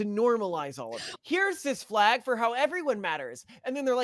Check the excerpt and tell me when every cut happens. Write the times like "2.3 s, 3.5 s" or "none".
1.1 s